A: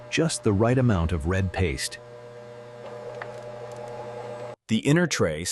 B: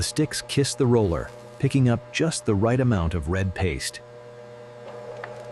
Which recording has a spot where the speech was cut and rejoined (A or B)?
A